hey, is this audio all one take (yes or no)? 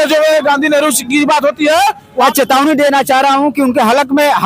no